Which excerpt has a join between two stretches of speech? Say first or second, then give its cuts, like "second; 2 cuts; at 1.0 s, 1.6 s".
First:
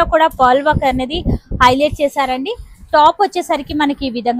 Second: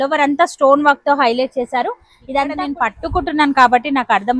second; 1 cut; at 2.8 s